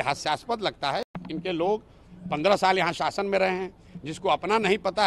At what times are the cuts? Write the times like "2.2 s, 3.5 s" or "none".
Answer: 1.2 s